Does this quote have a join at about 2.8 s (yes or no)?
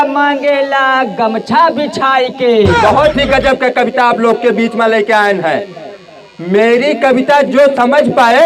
yes